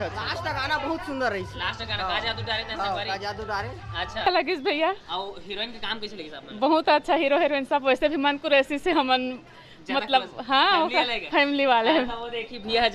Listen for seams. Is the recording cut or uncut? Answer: cut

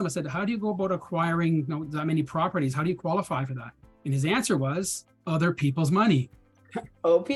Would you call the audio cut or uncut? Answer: uncut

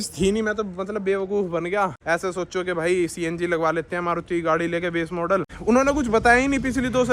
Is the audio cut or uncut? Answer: cut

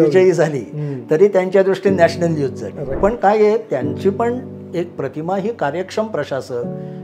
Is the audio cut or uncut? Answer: cut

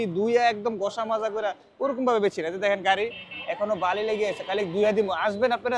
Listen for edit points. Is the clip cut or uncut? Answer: uncut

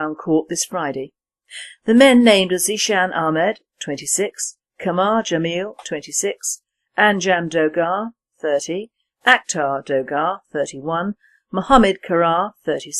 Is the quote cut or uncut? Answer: cut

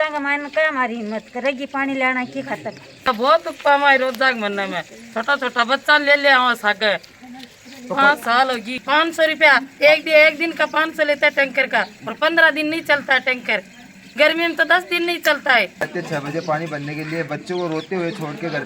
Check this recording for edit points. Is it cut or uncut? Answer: cut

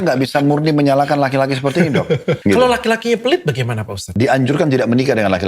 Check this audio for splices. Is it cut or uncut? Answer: cut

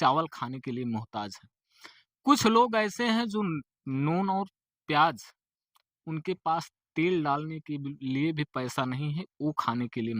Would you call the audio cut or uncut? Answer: uncut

